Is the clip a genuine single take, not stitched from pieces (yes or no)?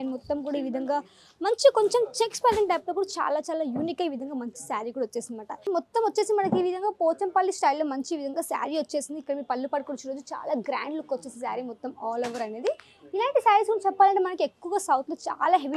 no